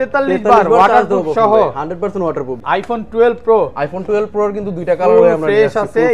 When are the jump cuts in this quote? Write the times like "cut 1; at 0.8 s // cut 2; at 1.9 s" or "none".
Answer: cut 1; at 2.5 s